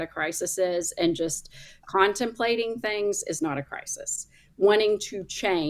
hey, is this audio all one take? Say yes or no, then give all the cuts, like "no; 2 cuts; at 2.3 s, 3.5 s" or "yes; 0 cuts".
yes; 0 cuts